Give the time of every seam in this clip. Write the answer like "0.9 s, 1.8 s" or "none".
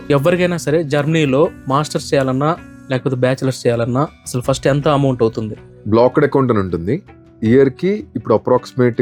none